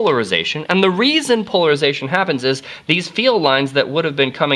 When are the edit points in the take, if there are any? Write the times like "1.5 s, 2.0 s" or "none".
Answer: 1.2 s